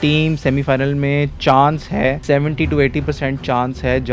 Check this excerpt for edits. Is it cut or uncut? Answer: cut